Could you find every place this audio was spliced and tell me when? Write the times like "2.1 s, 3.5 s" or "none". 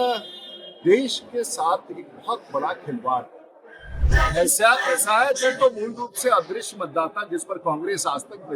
4.0 s